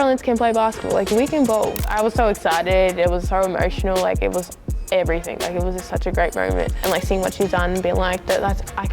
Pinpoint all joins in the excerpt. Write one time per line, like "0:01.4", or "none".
0:01.8
0:06.7